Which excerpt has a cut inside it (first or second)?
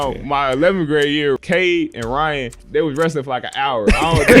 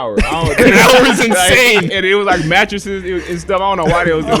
first